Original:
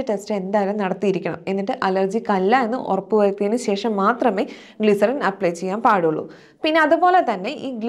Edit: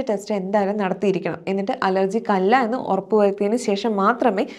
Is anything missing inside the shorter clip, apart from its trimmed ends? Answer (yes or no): no